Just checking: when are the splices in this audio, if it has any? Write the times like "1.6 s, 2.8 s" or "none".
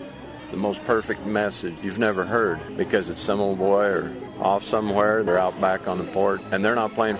1.8 s, 2.7 s, 4.2 s, 5.3 s, 6.4 s